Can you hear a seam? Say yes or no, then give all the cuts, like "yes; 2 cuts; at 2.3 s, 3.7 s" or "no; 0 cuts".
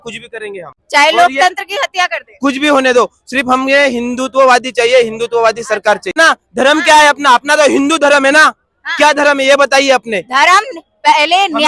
yes; 1 cut; at 6.2 s